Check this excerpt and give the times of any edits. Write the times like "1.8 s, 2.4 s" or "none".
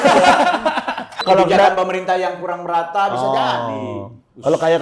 1.2 s